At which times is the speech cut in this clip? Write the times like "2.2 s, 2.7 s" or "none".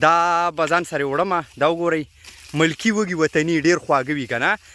none